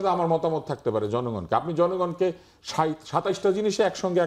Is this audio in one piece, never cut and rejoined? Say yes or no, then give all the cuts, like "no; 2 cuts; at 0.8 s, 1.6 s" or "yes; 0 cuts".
yes; 0 cuts